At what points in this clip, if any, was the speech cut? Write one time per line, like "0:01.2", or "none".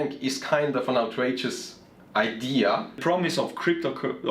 0:03.0